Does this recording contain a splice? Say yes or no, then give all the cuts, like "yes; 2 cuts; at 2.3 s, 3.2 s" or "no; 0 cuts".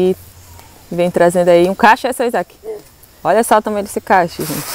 no; 0 cuts